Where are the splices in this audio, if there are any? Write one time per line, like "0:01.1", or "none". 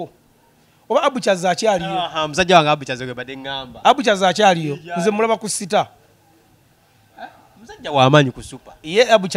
none